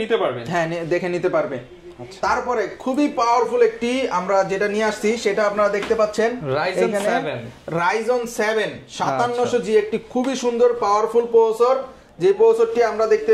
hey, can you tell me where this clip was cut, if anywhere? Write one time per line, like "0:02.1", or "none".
none